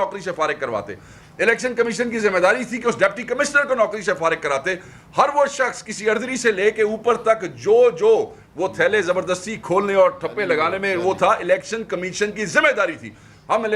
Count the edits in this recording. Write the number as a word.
zero